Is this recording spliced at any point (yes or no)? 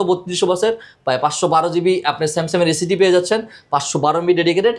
no